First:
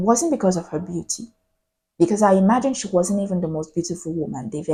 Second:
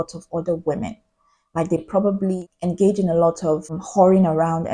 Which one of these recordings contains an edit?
second; 1 cut; at 1.9 s

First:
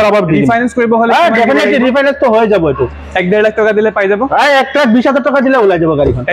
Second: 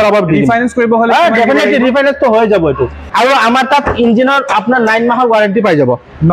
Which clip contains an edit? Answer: second; 1 cut; at 3.0 s

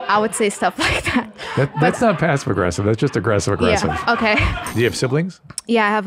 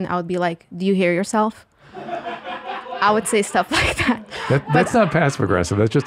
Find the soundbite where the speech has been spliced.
first; 1 cut; at 4.7 s

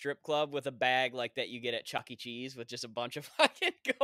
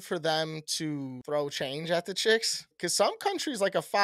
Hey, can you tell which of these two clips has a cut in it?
second; 2 cuts; at 1.2 s, 2.7 s

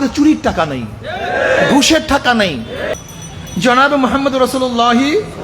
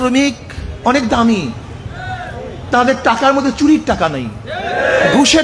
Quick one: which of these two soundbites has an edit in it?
first; 1 cut; at 2.9 s

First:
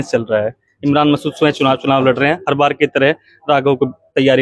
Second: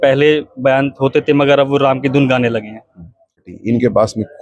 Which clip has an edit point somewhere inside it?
second; 1 cut; at 3.5 s

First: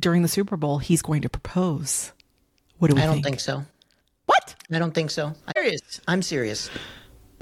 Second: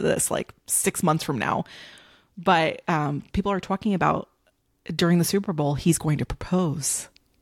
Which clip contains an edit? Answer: first; 1 cut; at 5.6 s

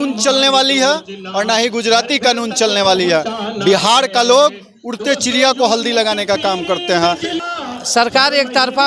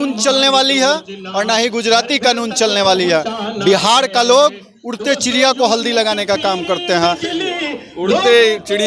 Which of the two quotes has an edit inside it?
first; 1 cut; at 7.4 s

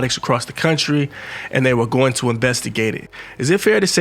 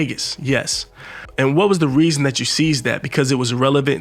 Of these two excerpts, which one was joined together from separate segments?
first; 1 cut; at 3.1 s

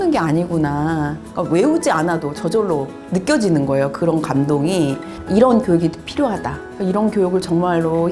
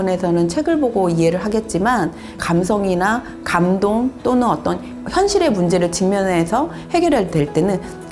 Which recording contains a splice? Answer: first; 2 cuts; at 3.0 s, 5.1 s

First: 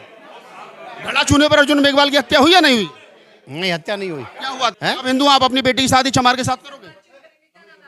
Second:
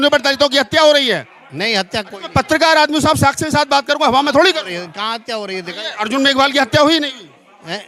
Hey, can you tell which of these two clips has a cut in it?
first; 1 cut; at 4.7 s

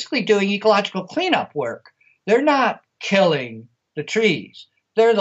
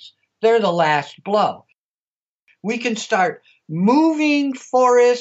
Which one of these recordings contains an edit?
second; 1 cut; at 2.1 s

